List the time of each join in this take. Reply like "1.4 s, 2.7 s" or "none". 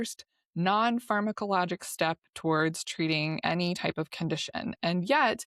none